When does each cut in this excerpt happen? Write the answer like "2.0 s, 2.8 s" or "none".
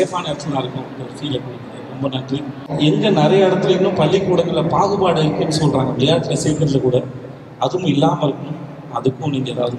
2.6 s